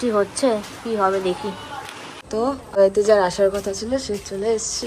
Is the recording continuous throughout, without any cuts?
yes; 0 cuts

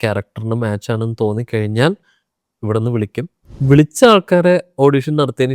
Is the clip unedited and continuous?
no; 1 cut; at 3.6 s

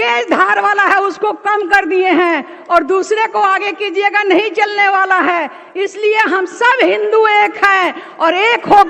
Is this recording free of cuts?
yes; 0 cuts

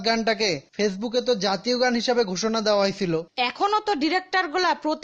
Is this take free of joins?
no; 1 cut; at 3.3 s

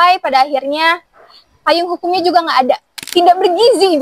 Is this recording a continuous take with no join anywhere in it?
no; 1 cut; at 2.9 s

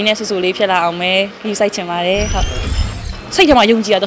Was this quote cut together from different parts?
yes; 1 cut; at 2.7 s

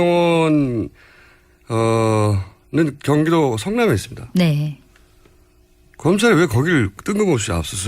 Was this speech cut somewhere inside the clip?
yes; 1 cut; at 3.0 s

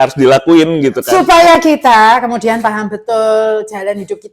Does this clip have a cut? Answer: yes; 1 cut; at 1.0 s

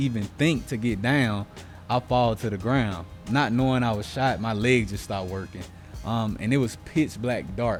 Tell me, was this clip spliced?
no; 0 cuts

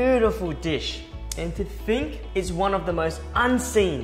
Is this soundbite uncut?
no; 1 cut; at 2.2 s

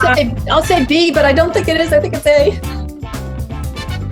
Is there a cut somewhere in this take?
no; 0 cuts

